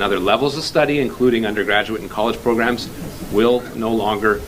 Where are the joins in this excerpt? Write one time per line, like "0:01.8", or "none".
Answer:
none